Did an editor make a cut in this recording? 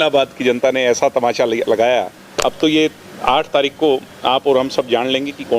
yes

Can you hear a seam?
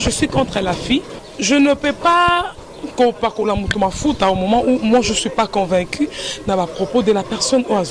yes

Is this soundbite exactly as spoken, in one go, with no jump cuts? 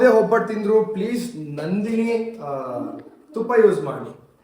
yes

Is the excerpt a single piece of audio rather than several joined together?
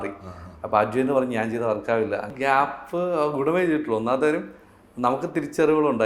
no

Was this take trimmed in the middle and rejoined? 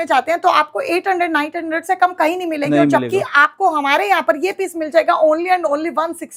no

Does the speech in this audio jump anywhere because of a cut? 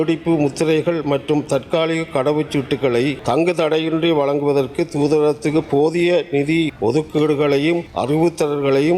yes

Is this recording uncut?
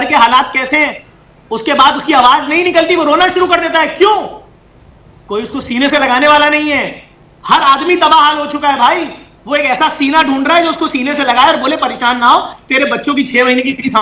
yes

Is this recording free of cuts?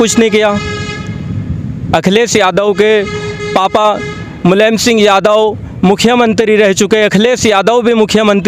yes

